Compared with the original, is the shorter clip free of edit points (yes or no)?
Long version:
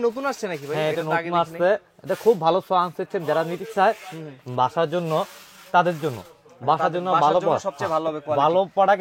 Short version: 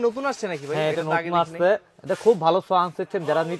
yes